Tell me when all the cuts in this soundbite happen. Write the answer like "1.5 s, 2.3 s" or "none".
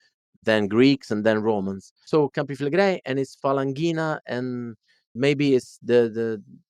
none